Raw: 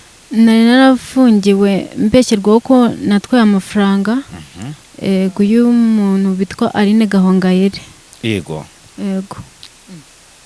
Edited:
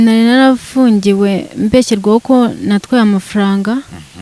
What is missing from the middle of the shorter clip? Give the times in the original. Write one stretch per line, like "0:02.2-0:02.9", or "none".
none

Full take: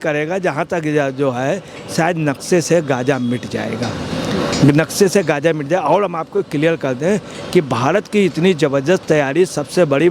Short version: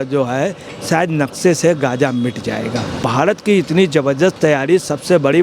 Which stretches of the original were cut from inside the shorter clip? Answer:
0:04.1-0:07.7

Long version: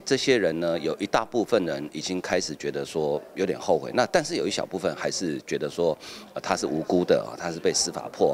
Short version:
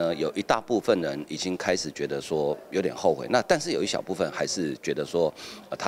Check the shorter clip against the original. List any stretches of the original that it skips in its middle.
none

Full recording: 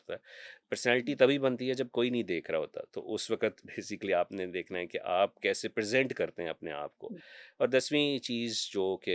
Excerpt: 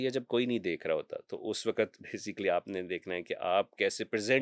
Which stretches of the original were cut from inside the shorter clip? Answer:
none

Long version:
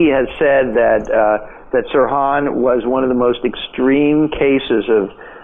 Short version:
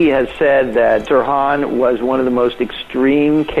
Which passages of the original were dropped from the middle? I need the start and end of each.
0:01.0-0:01.9

